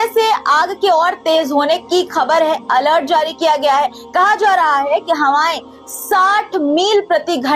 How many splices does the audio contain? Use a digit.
0